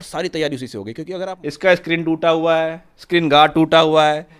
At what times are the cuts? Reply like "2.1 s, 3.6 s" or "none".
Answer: 1.1 s

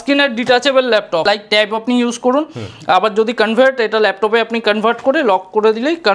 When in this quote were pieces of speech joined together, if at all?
1.2 s

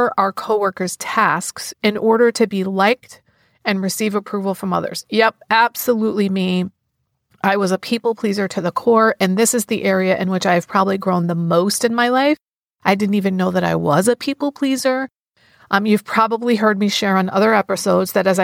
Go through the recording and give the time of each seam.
15.3 s

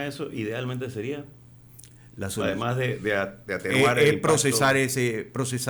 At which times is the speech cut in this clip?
none

